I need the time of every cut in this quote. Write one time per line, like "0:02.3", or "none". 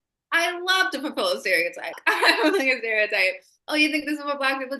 0:02.0